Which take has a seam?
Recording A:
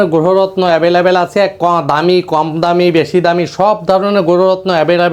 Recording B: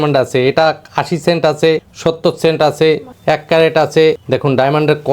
B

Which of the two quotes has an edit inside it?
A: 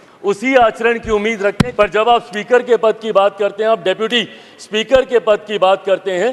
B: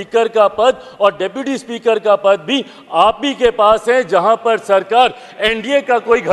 A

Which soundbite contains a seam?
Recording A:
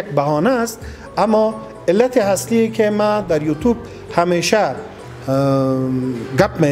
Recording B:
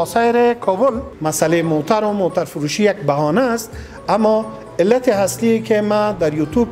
B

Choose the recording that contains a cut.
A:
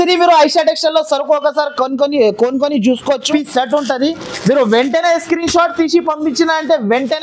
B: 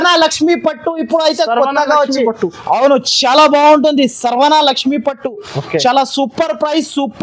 A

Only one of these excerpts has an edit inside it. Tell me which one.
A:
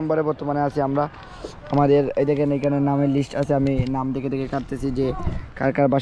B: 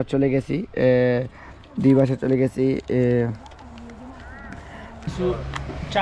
B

